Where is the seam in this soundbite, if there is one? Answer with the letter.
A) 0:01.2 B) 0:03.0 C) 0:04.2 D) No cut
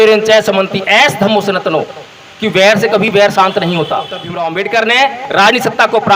C